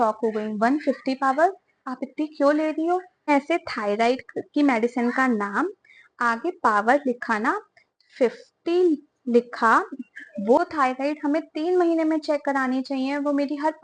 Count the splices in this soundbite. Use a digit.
2